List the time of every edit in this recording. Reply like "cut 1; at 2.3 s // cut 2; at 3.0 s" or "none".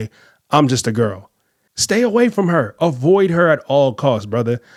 none